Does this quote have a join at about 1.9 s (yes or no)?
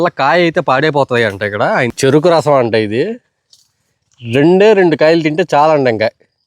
yes